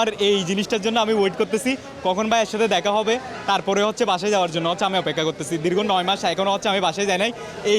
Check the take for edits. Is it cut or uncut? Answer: uncut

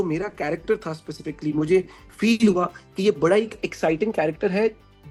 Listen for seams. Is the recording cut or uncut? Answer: uncut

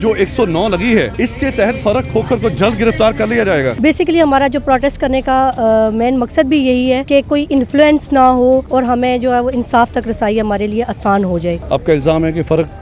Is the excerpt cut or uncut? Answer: cut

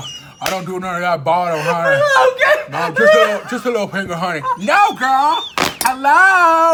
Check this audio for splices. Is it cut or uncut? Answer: uncut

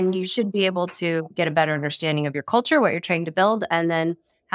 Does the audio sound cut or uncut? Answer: cut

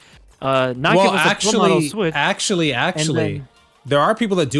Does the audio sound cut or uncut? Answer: uncut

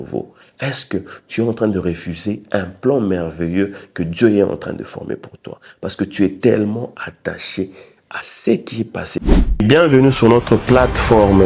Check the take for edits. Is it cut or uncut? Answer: cut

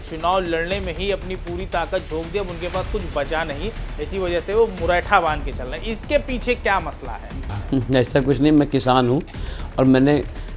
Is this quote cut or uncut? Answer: uncut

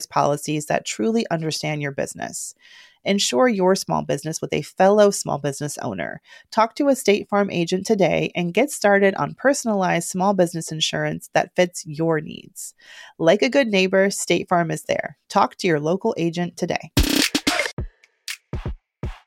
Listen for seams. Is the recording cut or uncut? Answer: cut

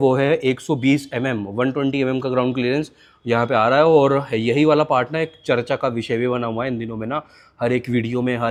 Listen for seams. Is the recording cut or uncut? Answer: uncut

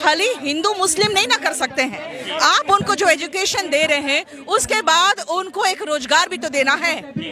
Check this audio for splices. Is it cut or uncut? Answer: uncut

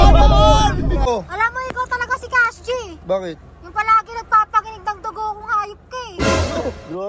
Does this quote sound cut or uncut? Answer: cut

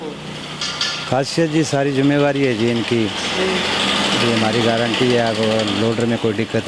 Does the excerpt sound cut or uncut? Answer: uncut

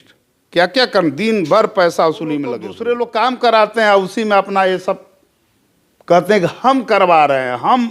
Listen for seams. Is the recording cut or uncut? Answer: cut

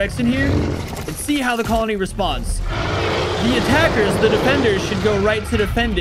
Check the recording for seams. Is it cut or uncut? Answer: uncut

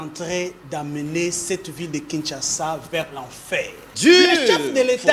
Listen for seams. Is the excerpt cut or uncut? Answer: cut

